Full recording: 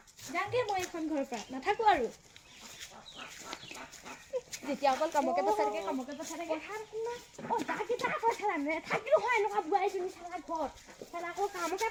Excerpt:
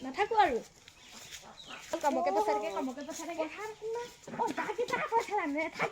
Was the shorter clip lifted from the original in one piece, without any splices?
no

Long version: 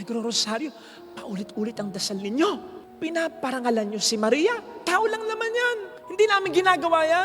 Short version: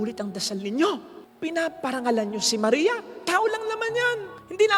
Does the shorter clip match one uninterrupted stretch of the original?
yes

